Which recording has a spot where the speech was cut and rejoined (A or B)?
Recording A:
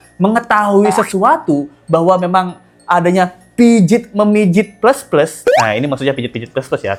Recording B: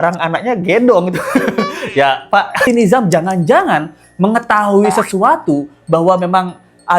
B